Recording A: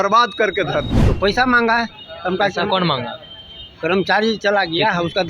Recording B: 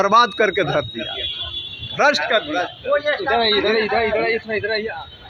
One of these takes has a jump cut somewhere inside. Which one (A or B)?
A